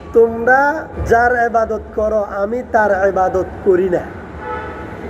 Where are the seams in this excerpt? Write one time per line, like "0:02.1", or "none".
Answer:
0:00.9